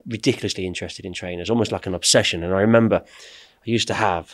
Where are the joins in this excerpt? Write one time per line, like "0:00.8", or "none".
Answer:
none